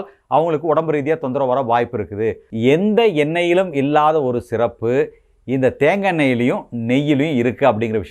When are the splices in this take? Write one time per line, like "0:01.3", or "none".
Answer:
0:02.5